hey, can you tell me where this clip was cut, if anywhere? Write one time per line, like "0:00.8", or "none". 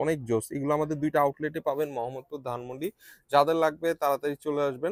none